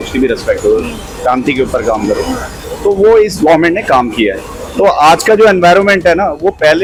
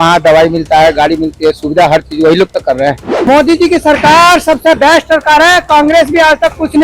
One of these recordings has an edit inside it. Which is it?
second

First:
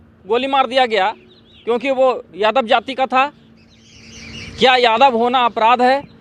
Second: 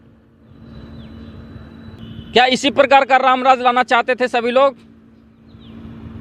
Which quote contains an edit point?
second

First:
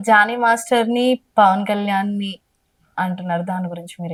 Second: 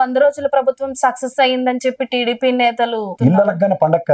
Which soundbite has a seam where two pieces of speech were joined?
second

